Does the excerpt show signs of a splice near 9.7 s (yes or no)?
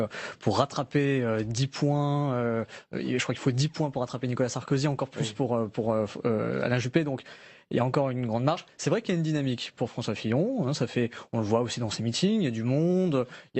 no